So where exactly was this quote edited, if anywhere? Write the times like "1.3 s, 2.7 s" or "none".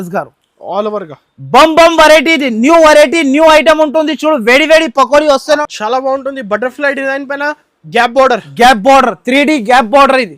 5.6 s